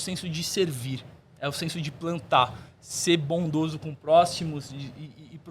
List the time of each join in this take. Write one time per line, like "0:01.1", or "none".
none